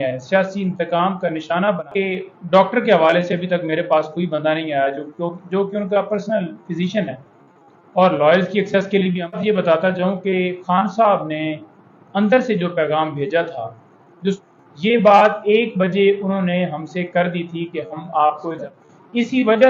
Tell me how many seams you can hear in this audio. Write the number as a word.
four